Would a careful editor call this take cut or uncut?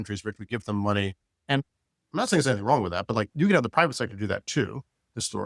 uncut